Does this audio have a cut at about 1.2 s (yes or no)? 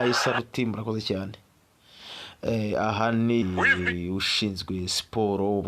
no